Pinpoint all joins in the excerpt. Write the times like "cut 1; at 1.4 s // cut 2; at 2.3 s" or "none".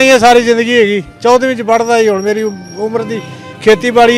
none